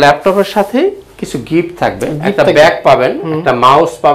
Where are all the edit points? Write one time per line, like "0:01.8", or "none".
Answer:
none